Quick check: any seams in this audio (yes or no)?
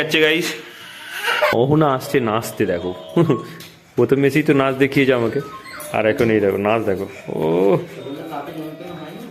yes